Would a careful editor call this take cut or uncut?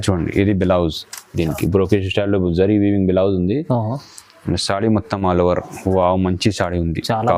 uncut